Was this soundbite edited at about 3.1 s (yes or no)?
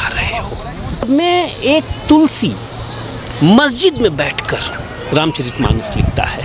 no